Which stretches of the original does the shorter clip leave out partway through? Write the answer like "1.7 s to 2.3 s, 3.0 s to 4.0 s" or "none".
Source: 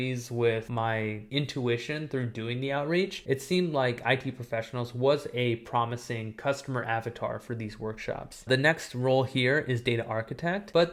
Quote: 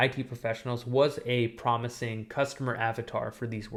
none